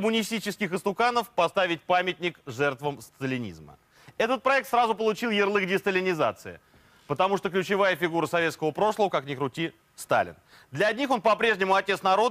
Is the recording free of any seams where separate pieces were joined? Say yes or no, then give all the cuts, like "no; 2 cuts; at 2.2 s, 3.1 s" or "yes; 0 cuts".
yes; 0 cuts